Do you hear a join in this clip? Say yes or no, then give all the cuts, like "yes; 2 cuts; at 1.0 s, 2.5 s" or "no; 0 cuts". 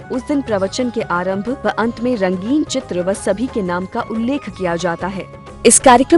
yes; 1 cut; at 5.2 s